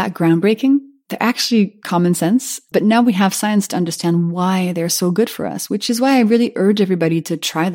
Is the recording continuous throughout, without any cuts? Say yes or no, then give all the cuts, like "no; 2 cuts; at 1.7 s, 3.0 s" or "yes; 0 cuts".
yes; 0 cuts